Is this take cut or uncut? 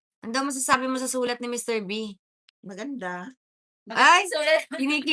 uncut